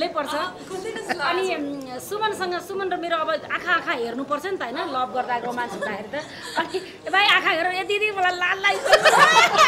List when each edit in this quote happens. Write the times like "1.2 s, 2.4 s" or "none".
none